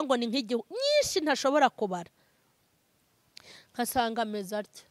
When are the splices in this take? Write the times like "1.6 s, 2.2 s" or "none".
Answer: none